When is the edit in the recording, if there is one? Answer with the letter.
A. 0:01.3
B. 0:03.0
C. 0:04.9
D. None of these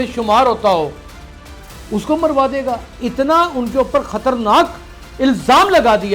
B